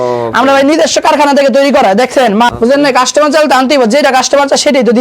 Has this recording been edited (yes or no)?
yes